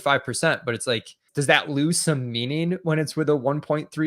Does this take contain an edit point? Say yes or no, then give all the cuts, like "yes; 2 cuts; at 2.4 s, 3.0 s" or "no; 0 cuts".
yes; 1 cut; at 1.3 s